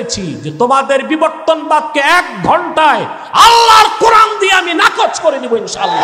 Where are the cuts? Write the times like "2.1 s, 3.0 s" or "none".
none